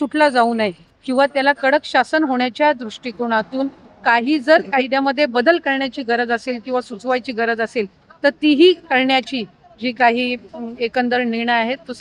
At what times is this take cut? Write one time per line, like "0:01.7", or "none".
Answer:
none

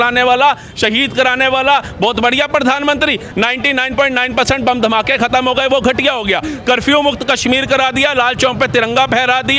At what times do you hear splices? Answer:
none

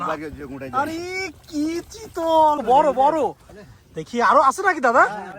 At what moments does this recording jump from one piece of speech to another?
0:02.6

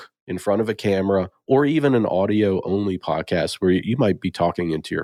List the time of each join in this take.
none

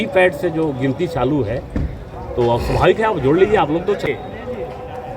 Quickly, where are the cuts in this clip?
0:04.0

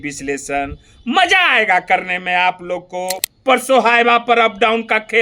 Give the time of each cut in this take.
0:03.3

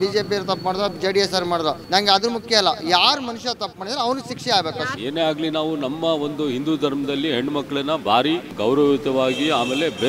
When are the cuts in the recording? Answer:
0:01.8
0:04.9
0:08.5

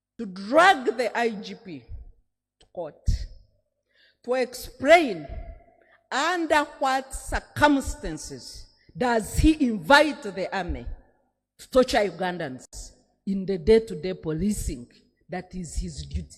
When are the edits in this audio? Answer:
none

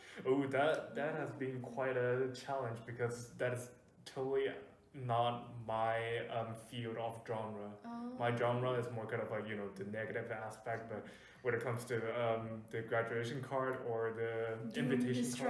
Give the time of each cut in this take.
none

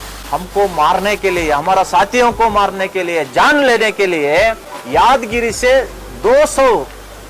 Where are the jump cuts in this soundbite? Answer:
none

